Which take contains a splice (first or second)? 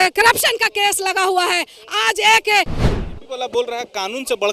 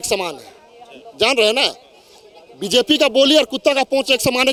first